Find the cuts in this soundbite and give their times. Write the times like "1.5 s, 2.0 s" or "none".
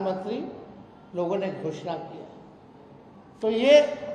none